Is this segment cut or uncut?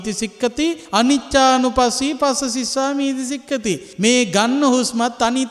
cut